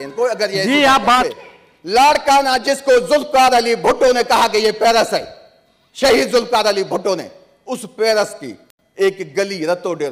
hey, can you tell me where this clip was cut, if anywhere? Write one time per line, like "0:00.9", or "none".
0:01.3